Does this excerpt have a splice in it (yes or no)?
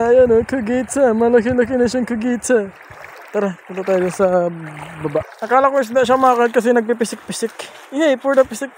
no